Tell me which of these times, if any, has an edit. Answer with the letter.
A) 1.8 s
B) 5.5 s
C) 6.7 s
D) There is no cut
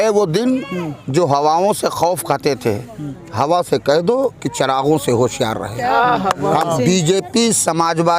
C